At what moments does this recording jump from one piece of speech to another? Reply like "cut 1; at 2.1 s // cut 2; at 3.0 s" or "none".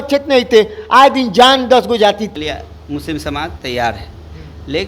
cut 1; at 2.3 s